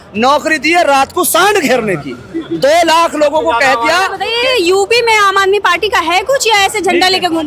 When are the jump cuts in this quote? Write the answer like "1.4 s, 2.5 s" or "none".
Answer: 4.2 s